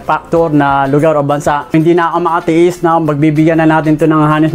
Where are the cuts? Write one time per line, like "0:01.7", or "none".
0:01.7